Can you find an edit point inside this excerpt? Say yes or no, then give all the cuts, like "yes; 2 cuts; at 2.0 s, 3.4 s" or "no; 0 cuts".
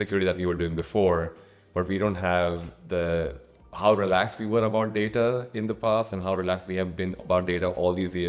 no; 0 cuts